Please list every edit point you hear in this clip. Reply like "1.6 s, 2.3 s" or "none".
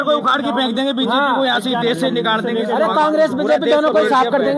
none

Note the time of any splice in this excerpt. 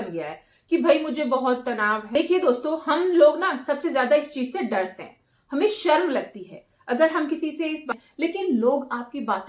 2.0 s, 7.9 s

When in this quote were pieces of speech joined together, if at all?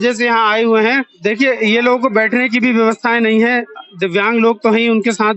1.1 s

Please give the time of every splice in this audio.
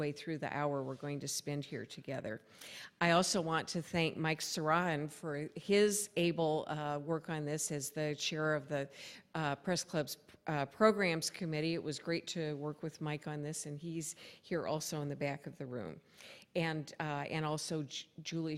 none

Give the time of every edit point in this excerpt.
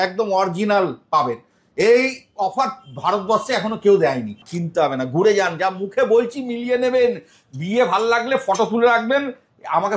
4.4 s

